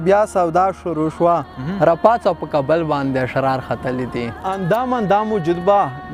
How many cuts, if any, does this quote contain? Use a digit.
1